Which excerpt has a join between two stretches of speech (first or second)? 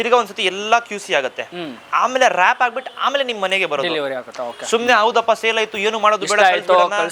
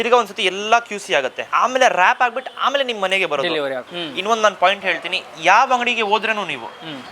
second